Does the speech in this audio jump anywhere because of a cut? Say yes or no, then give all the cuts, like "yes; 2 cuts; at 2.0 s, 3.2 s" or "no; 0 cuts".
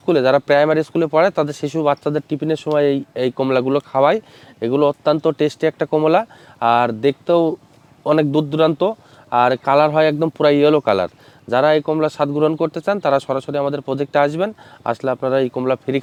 no; 0 cuts